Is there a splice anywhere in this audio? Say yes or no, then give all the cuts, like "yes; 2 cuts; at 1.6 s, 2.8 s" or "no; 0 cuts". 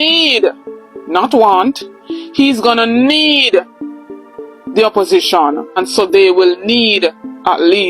yes; 1 cut; at 5.8 s